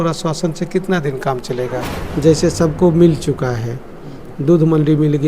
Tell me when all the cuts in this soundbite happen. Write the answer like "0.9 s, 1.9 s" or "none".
2.0 s

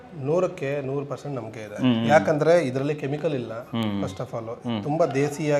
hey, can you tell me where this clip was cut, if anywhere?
none

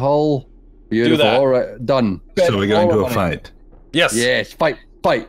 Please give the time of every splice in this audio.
2.2 s

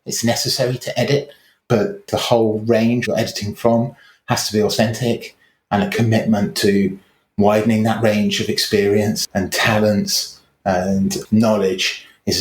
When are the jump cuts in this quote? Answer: 2.0 s, 3.0 s

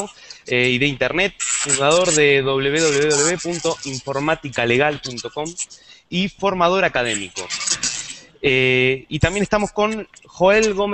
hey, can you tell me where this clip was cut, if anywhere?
4.3 s

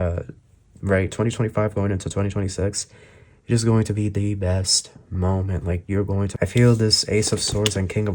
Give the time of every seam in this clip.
6.3 s

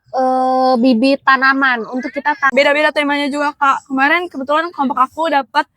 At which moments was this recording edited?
2.5 s

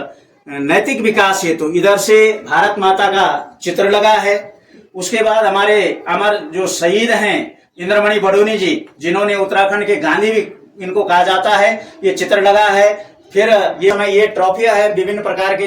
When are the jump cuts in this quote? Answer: 13.9 s

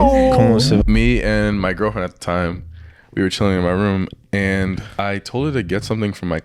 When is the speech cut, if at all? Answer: 0.8 s, 4.9 s

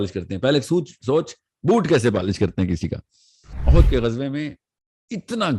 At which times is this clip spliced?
3.5 s

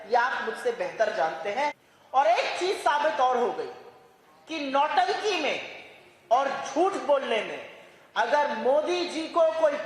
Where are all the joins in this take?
1.9 s

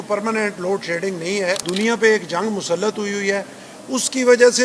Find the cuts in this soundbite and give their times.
1.7 s

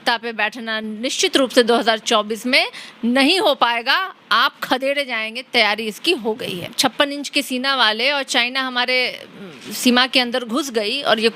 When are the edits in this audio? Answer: 6.6 s

